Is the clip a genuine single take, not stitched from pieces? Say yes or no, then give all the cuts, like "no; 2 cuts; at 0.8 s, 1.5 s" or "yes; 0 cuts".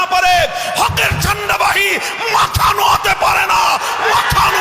yes; 0 cuts